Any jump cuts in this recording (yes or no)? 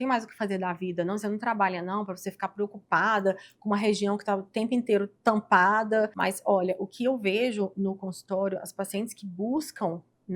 yes